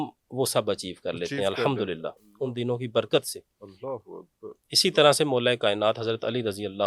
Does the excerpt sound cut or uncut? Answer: uncut